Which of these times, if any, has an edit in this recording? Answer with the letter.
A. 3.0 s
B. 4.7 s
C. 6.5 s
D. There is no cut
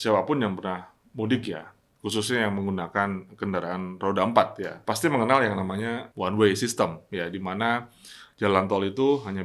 B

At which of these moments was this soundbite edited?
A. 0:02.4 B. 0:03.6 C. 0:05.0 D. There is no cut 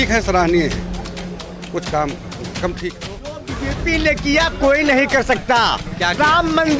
B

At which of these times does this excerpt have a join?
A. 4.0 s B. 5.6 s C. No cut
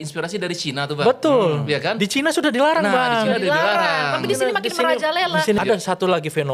B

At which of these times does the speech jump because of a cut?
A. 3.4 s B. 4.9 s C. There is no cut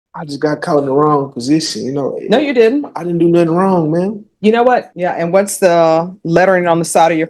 B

